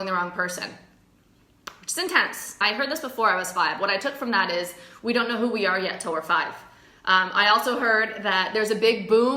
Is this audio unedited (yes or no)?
no